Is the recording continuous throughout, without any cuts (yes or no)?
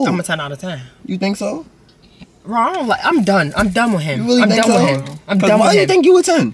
yes